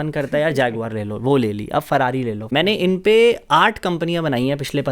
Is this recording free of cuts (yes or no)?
no